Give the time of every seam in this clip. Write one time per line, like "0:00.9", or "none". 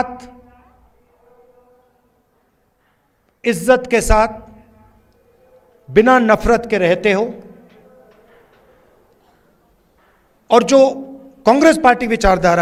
none